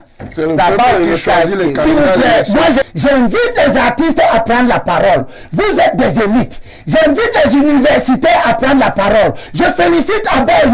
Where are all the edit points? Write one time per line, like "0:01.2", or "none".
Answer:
0:02.8